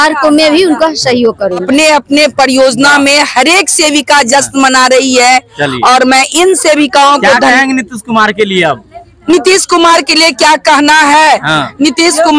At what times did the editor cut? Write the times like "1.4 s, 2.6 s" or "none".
1.6 s